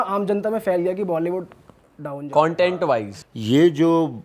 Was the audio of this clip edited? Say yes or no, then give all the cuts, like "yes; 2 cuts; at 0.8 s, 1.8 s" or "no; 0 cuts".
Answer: yes; 1 cut; at 3.1 s